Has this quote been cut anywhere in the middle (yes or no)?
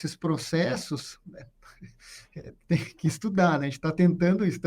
no